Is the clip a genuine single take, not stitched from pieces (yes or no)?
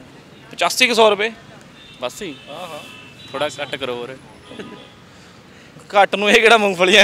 yes